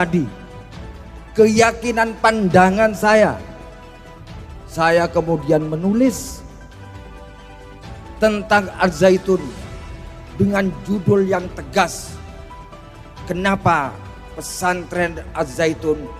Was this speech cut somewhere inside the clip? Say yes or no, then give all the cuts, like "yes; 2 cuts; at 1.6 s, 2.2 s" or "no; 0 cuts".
no; 0 cuts